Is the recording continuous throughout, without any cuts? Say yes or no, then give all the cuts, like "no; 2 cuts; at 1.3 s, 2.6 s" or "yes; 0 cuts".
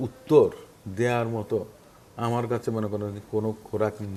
yes; 0 cuts